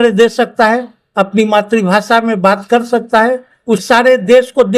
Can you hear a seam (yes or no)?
yes